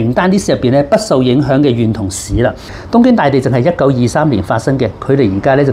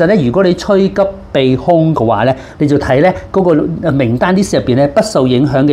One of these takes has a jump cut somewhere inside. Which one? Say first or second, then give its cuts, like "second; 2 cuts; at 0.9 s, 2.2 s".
first; 1 cut; at 2.7 s